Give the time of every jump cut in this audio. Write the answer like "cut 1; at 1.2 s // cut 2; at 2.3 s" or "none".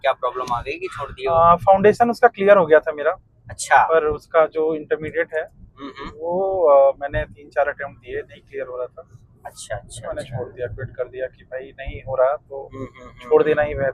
none